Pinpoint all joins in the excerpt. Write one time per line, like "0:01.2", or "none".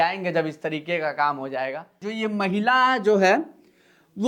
0:02.0